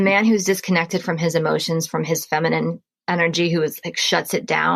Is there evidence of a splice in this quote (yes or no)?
no